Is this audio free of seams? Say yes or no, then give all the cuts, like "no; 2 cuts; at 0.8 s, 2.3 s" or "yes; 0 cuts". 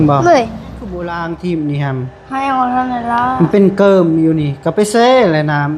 no; 1 cut; at 1.0 s